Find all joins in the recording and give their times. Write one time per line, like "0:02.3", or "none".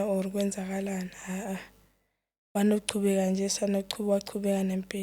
none